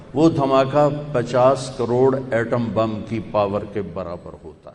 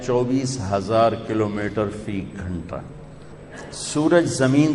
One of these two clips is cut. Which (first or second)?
second